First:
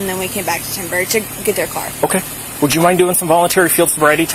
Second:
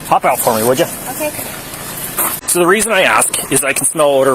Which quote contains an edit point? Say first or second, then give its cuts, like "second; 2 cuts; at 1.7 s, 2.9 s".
second; 1 cut; at 2.4 s